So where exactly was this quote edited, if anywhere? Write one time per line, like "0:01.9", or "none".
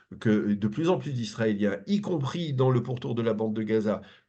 none